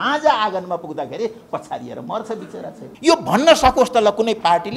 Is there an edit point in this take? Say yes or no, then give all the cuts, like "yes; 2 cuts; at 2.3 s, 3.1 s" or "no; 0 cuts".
yes; 1 cut; at 2.8 s